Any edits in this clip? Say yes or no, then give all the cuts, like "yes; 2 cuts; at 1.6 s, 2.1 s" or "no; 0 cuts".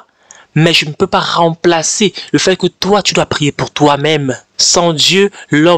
yes; 1 cut; at 4.4 s